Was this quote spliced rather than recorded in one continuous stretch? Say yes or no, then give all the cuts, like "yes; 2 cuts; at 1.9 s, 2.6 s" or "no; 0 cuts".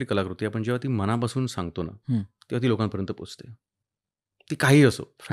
no; 0 cuts